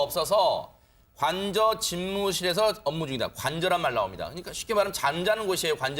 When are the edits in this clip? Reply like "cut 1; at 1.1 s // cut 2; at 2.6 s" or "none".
none